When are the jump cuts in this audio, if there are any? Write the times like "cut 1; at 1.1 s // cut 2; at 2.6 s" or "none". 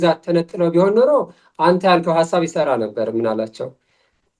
none